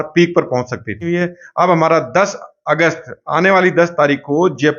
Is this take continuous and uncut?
no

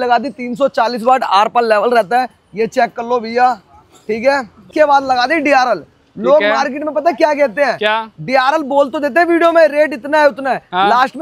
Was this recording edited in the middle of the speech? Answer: yes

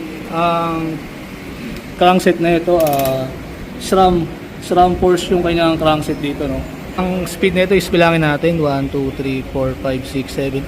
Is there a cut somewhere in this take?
yes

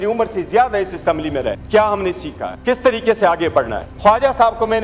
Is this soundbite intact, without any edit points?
no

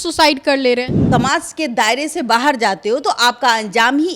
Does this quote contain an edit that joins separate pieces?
yes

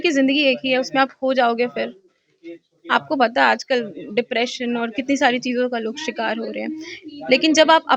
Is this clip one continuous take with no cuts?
yes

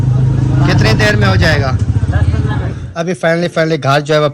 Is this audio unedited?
no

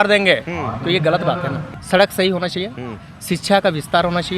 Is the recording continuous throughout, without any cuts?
no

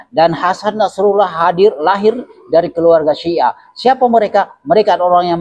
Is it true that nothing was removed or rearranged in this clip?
yes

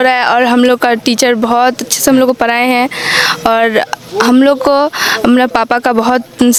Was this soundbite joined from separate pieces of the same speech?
no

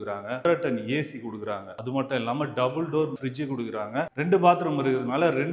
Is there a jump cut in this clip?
no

